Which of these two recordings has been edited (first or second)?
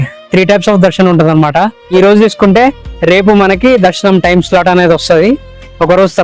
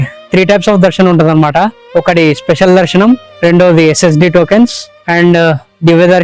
first